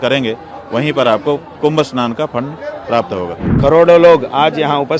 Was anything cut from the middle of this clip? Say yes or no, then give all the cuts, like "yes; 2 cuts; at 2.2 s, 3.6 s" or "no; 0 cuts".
yes; 1 cut; at 3.4 s